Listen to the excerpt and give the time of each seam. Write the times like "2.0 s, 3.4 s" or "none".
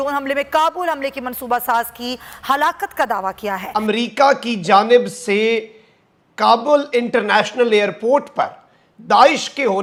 none